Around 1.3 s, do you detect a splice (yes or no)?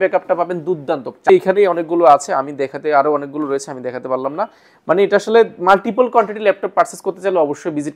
yes